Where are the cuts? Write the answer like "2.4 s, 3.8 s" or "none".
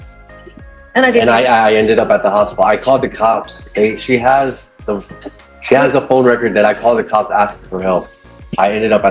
7.7 s

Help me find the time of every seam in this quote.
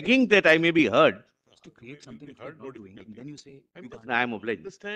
none

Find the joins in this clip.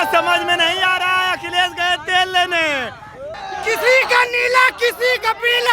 3.3 s

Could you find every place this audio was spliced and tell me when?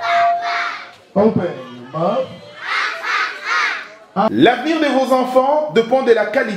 4.3 s

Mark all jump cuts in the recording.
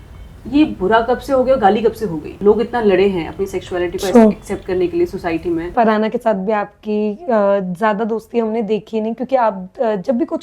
2.3 s, 5.7 s

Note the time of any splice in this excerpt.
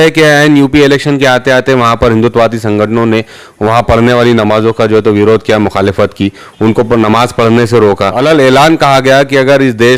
8.2 s

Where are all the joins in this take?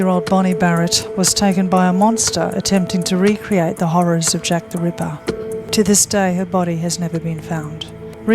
2.5 s, 5.7 s

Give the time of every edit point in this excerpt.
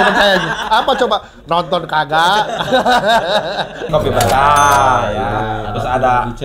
3.9 s

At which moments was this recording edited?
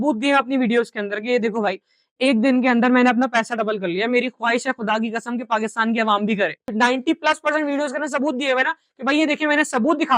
6.7 s

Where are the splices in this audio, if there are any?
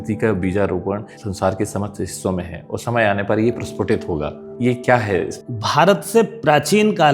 1.2 s, 4.5 s, 5.4 s

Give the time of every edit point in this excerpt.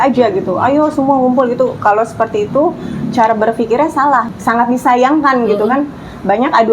4.3 s

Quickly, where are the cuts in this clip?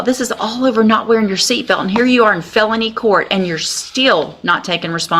none

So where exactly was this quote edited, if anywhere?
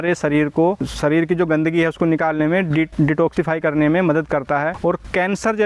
0.9 s, 4.7 s

